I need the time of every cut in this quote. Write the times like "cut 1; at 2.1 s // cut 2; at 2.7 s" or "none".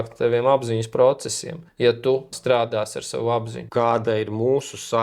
cut 1; at 2.3 s // cut 2; at 3.7 s